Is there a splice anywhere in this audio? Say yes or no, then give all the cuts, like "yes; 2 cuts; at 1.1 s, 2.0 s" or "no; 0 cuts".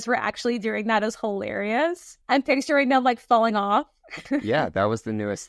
yes; 2 cuts; at 2.1 s, 4.4 s